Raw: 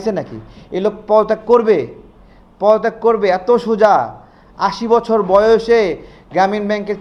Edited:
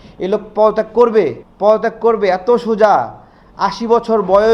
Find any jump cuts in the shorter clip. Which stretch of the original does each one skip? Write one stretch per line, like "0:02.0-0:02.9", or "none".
0:02.0-0:02.4